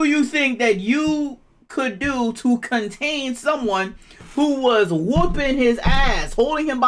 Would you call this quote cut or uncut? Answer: uncut